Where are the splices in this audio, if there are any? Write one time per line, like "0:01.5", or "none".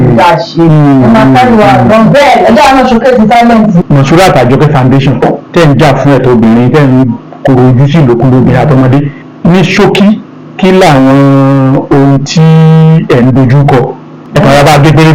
0:03.8
0:09.2
0:14.2